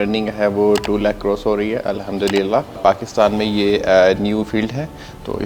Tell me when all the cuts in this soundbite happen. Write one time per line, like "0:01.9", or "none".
0:02.8

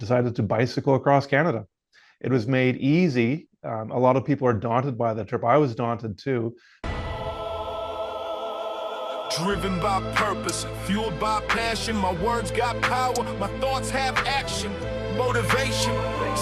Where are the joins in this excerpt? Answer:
0:06.7

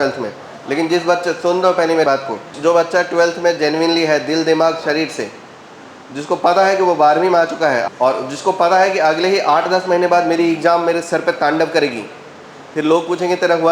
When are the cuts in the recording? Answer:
0:02.1
0:07.8

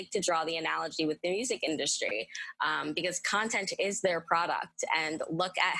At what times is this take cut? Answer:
none

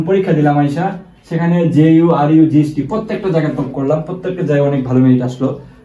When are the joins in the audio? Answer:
none

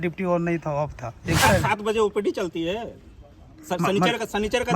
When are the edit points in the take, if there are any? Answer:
0:01.4

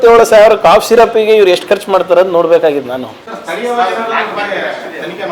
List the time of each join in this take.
none

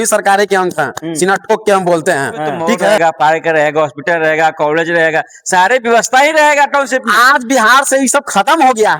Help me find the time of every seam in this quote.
0:03.0

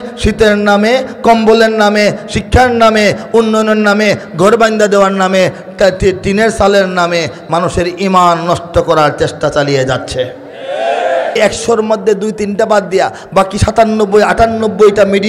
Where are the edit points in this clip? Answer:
0:11.4

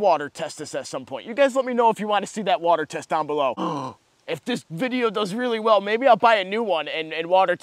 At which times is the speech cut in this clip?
0:03.6

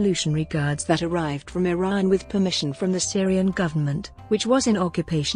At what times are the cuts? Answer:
none

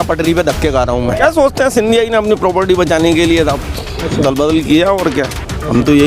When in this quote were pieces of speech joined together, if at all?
0:01.2

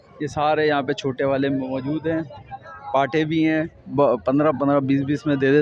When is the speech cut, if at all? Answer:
none

